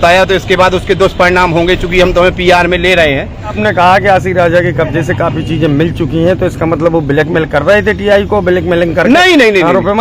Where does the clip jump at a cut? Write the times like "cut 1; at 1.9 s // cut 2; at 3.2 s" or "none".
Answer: cut 1; at 3.6 s